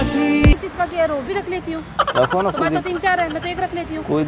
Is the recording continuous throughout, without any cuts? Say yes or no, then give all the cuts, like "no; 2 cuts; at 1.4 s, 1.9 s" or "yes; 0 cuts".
no; 1 cut; at 1.3 s